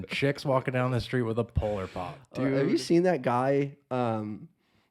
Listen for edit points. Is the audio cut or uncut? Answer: cut